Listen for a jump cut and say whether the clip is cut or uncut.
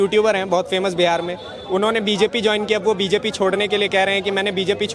uncut